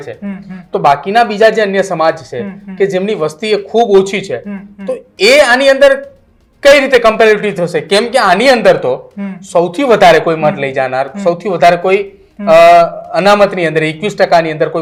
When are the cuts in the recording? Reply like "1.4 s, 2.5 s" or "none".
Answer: none